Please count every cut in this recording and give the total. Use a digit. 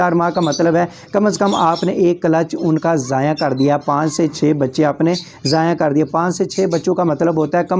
0